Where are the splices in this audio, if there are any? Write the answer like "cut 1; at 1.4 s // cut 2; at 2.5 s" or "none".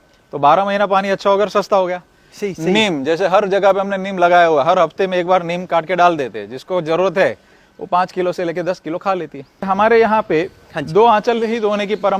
cut 1; at 9.7 s

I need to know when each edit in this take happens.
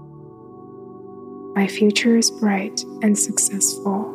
cut 1; at 1.5 s

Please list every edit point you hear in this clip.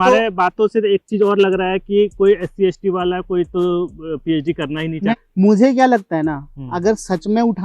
cut 1; at 5.1 s

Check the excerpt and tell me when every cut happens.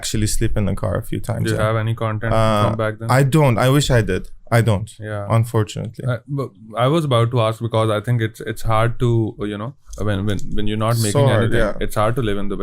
none

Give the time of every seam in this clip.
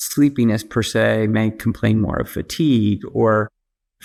none

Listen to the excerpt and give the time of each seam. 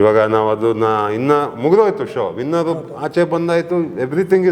none

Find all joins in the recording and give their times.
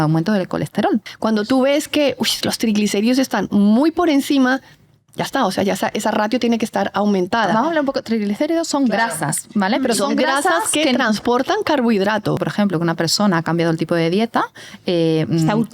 cut 1; at 1.1 s // cut 2; at 12.4 s

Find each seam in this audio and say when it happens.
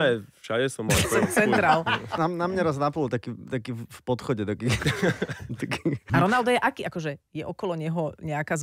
cut 1; at 2.1 s // cut 2; at 6.1 s

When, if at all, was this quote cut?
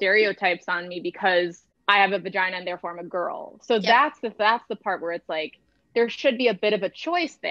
cut 1; at 1.7 s

